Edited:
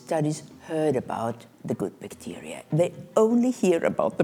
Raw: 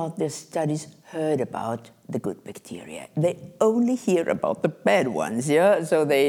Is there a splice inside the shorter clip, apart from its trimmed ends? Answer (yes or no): no